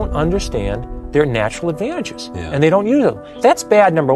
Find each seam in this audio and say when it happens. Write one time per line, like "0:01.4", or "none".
0:03.3